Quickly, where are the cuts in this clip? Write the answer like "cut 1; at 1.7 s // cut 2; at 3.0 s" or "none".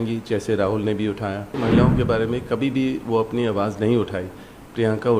cut 1; at 1.6 s

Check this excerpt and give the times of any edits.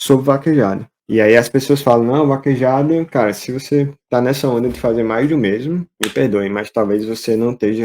cut 1; at 0.9 s // cut 2; at 6.0 s

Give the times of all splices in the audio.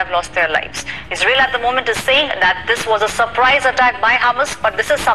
none

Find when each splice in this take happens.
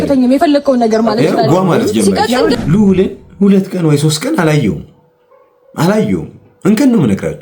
cut 1; at 2.6 s

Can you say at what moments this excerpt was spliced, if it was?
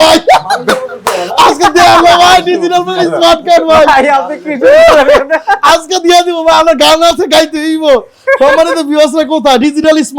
none

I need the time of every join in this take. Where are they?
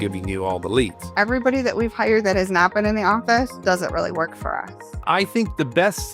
cut 1; at 1.0 s // cut 2; at 5.0 s

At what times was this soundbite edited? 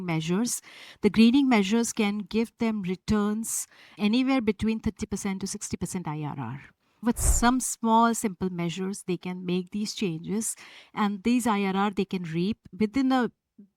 cut 1; at 7.0 s // cut 2; at 12.7 s

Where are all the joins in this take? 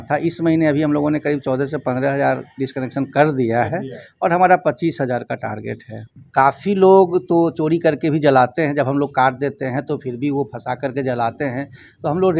cut 1; at 6.1 s

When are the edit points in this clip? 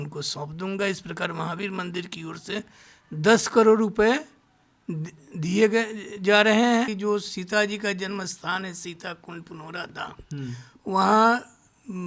cut 1; at 6.9 s

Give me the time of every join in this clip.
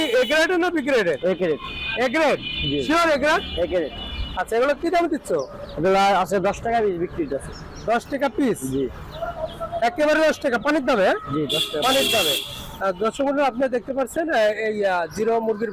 none

